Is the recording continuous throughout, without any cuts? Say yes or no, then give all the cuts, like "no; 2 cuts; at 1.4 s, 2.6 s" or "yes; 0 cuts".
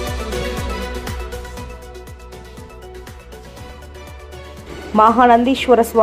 no; 2 cuts; at 2.1 s, 3.5 s